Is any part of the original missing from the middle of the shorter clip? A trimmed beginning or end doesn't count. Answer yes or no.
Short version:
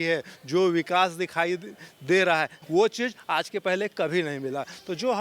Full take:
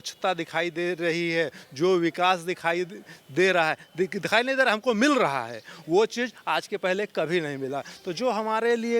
yes